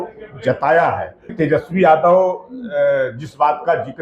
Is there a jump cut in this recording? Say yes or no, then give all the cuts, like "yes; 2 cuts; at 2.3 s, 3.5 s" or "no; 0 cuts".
yes; 1 cut; at 1.3 s